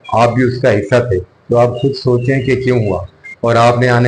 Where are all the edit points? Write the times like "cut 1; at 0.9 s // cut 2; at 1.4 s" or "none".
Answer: none